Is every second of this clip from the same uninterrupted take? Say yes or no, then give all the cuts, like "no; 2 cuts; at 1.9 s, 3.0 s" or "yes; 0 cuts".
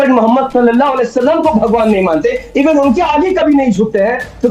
yes; 0 cuts